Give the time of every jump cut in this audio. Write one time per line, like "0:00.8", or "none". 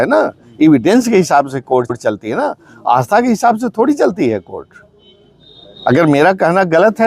none